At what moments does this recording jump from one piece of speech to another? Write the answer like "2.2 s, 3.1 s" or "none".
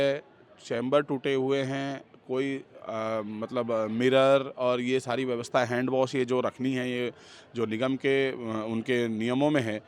none